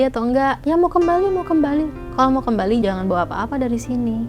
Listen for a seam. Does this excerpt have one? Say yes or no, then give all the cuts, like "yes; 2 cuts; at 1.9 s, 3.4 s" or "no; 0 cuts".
yes; 2 cuts; at 2.0 s, 2.8 s